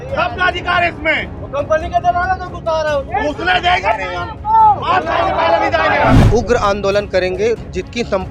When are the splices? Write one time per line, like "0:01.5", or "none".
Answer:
0:06.2